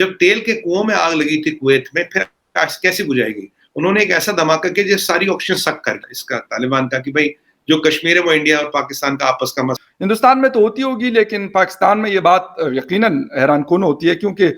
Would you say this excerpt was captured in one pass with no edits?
no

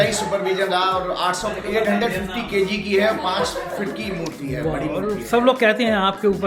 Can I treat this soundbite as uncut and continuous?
yes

